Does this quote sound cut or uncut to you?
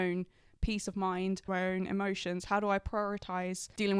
cut